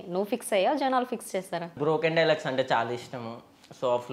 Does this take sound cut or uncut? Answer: cut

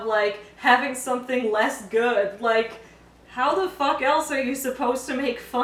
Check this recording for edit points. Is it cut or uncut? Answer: uncut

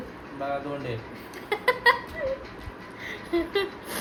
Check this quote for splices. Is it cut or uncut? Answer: uncut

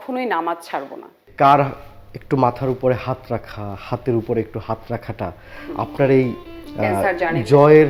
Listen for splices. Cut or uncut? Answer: cut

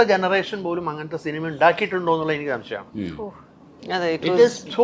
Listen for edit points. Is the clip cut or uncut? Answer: uncut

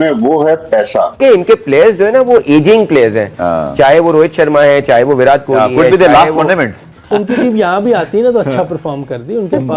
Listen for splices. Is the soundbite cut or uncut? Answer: cut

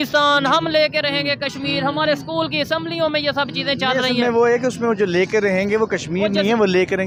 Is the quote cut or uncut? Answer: uncut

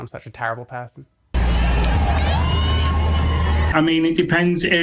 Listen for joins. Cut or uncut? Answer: cut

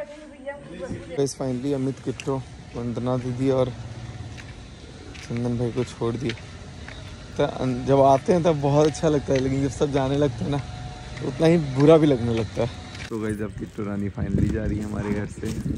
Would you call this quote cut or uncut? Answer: cut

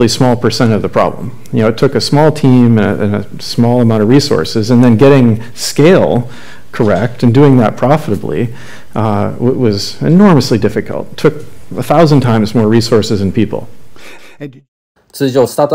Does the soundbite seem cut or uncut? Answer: uncut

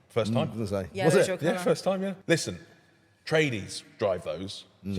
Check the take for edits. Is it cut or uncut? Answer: cut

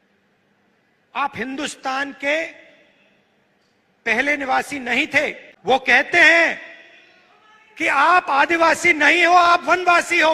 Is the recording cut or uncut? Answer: cut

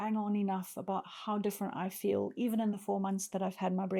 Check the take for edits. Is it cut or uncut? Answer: uncut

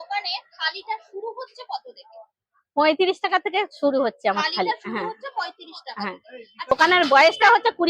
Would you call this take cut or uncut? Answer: cut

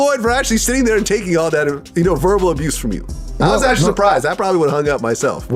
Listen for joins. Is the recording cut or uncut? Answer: uncut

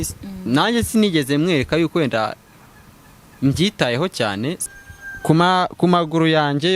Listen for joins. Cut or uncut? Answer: cut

